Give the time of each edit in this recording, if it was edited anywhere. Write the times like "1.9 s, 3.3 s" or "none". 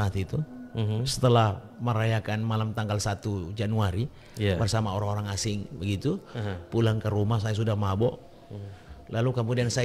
none